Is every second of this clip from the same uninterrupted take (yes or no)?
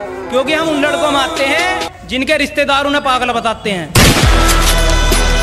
yes